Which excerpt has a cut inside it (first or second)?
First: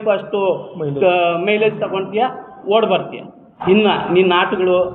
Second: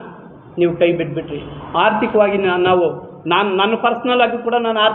first